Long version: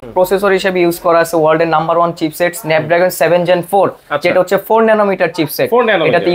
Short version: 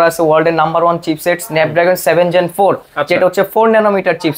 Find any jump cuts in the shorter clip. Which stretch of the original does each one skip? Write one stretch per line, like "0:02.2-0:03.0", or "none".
none